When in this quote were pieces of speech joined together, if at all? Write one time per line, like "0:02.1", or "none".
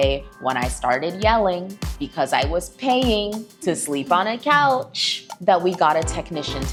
none